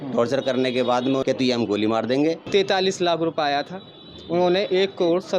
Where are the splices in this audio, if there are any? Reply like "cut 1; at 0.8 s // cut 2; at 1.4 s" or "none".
cut 1; at 1.2 s // cut 2; at 2.4 s

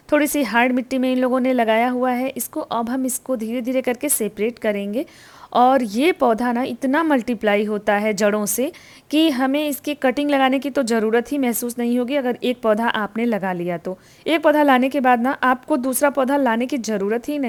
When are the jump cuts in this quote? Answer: none

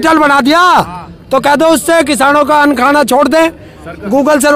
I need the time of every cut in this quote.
none

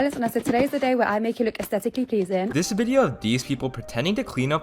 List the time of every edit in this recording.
cut 1; at 2.5 s

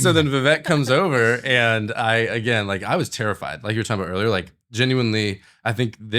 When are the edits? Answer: none

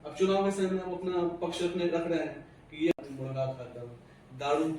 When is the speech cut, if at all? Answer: cut 1; at 2.9 s

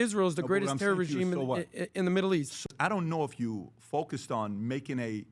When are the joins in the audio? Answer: cut 1; at 2.6 s

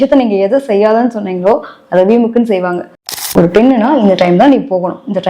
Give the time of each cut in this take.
cut 1; at 3.1 s

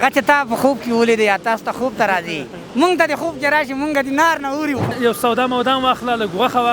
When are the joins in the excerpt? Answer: cut 1; at 4.9 s

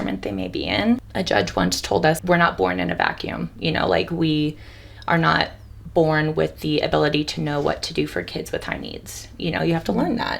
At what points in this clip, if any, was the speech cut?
cut 1; at 1.1 s // cut 2; at 2.2 s

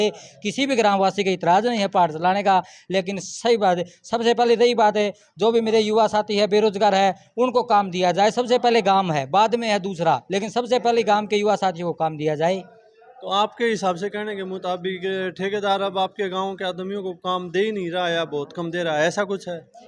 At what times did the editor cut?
none

